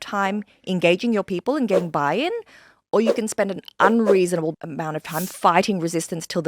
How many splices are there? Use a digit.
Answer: 1